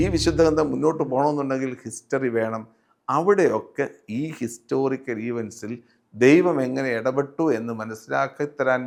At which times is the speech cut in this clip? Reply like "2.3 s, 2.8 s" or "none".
none